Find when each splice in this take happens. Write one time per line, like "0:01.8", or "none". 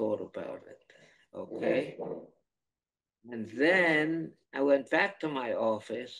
0:04.4